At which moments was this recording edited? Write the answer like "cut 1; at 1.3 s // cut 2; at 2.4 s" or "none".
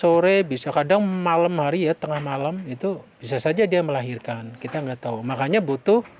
none